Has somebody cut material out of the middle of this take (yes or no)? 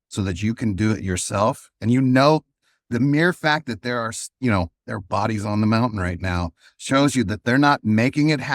no